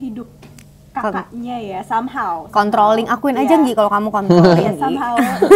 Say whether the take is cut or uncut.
uncut